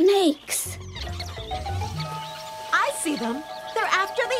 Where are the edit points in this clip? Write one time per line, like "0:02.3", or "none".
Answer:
0:01.0